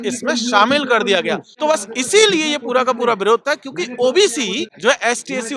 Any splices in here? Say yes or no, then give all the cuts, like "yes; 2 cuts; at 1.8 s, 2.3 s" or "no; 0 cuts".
yes; 2 cuts; at 1.5 s, 4.7 s